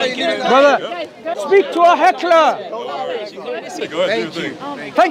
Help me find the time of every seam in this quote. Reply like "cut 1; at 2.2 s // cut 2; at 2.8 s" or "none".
cut 1; at 1.3 s // cut 2; at 3.8 s